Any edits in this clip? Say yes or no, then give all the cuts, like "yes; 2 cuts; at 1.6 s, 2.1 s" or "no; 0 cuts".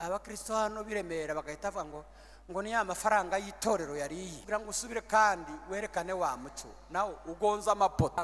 yes; 1 cut; at 4.4 s